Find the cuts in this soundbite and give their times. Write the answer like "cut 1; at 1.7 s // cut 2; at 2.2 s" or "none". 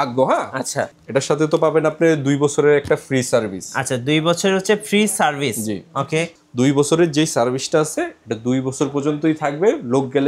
cut 1; at 0.9 s // cut 2; at 6.3 s